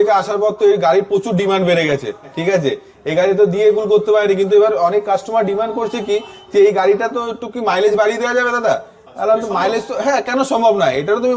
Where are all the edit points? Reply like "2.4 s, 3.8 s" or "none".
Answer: none